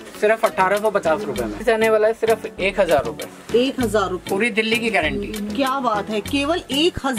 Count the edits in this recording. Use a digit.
1